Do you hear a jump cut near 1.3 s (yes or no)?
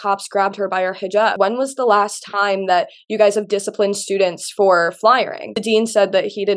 yes